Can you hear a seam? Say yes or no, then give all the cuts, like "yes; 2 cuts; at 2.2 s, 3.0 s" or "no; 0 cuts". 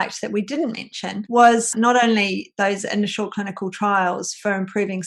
yes; 1 cut; at 1.7 s